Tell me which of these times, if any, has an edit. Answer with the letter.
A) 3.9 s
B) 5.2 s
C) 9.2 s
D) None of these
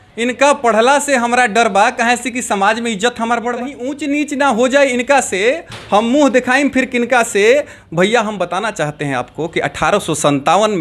A